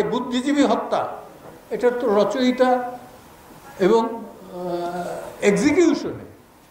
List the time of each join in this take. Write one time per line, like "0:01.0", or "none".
none

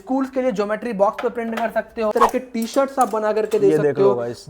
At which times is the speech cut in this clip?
0:02.1

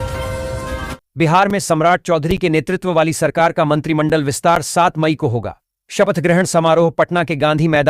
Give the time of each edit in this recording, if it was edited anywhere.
0:01.0

